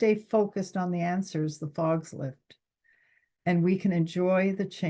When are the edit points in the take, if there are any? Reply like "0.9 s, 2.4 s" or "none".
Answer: none